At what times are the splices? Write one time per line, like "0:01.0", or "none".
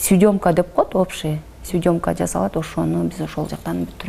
none